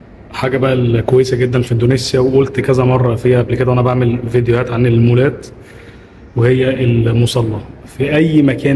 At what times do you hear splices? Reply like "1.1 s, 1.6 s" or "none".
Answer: none